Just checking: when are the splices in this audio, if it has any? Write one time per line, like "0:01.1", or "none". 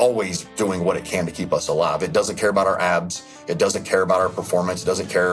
none